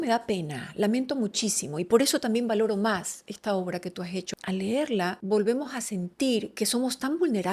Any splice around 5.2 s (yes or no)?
yes